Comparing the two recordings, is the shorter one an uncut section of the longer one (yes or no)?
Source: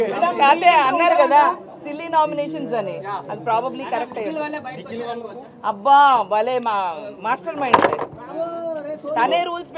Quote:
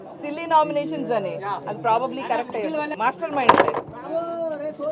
no